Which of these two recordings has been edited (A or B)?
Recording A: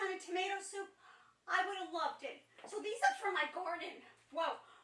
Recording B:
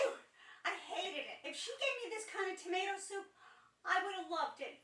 B